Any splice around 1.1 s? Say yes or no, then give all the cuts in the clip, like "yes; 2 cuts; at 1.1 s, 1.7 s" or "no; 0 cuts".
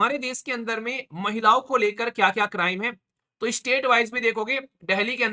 no; 1 cut; at 3.2 s